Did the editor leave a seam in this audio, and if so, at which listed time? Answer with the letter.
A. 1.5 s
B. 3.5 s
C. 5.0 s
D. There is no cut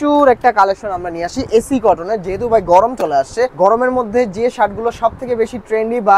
B